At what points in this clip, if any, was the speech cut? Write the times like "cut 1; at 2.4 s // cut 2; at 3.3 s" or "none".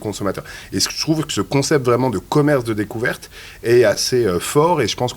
cut 1; at 4.0 s